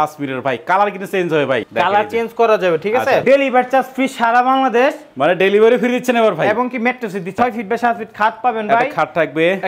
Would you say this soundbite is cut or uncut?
cut